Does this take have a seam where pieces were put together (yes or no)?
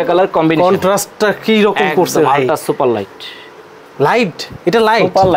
no